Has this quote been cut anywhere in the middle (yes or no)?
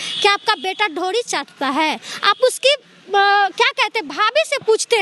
no